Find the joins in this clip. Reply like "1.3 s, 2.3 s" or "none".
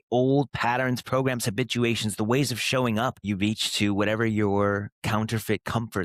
3.2 s